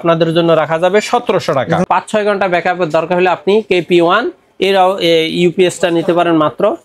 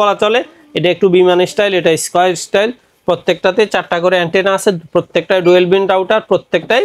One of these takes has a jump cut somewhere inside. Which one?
first; 1 cut; at 1.8 s

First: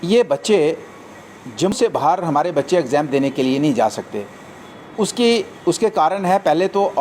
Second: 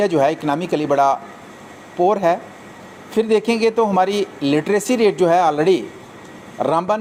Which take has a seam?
first; 1 cut; at 1.7 s

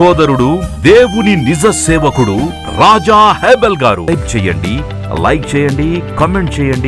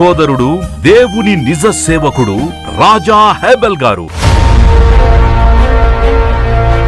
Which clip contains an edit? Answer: second; 1 cut; at 4.0 s

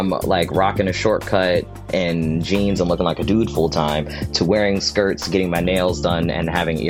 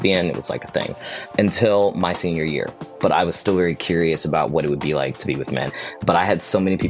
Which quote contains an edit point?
second; 2 cuts; at 2.8 s, 5.7 s

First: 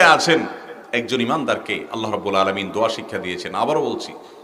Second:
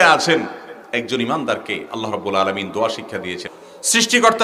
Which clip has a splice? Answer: second; 1 cut; at 3.4 s

